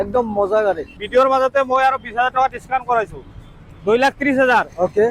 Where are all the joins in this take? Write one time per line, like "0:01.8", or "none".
0:01.0